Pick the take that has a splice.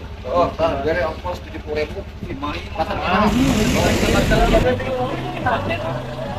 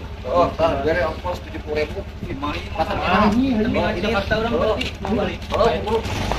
first; 1 cut; at 3.9 s

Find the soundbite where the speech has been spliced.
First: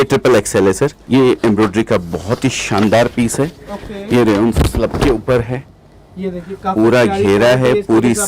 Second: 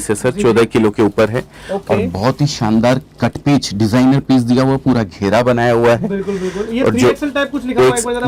first; 1 cut; at 1.0 s

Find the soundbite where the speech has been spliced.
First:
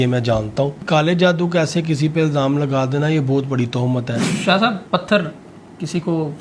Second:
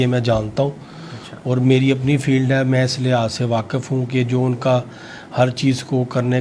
first; 2 cuts; at 0.8 s, 4.2 s

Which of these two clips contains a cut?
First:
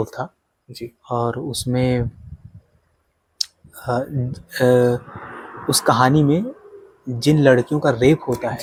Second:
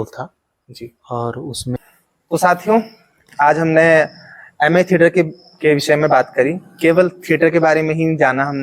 second; 1 cut; at 1.8 s

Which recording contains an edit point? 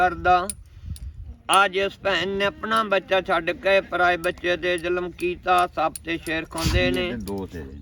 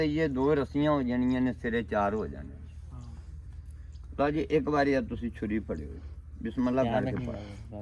first; 1 cut; at 6.9 s

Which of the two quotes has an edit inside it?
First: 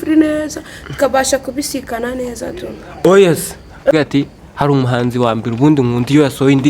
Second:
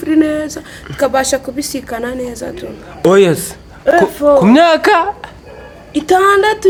first; 1 cut; at 3.9 s

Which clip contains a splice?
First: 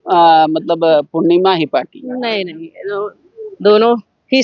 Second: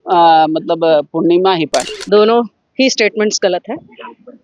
second; 1 cut; at 1.9 s

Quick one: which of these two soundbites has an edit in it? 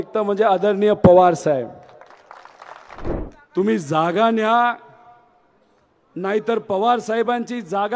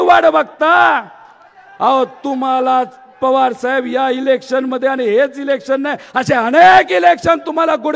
first; 1 cut; at 3.1 s

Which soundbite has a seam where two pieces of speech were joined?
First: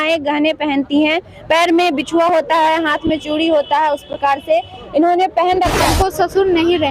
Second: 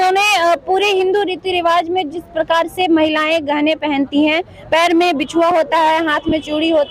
first; 1 cut; at 5.8 s

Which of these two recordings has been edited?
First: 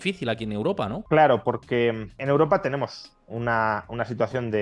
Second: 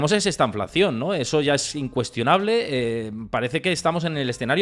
first; 2 cuts; at 1.0 s, 2.1 s

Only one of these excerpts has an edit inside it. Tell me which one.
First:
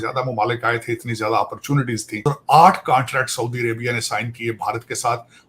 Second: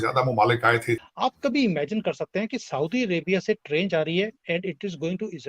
second; 1 cut; at 1.1 s

